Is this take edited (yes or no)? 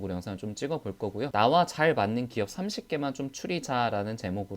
yes